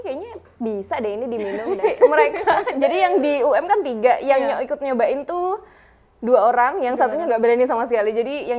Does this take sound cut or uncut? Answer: cut